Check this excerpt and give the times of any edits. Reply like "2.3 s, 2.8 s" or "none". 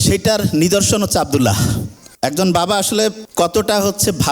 3.2 s

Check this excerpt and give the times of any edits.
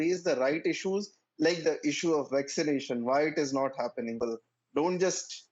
4.2 s

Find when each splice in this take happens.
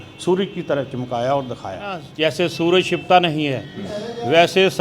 2.1 s

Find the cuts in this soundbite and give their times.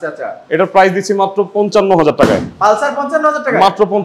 none

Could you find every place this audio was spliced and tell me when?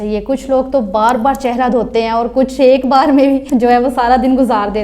3.4 s

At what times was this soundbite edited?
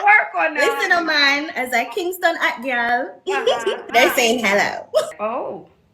3.8 s, 5.1 s

